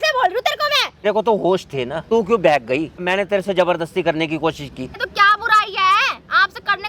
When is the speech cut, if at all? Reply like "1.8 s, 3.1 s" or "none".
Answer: 1.0 s, 2.1 s, 3.0 s, 5.1 s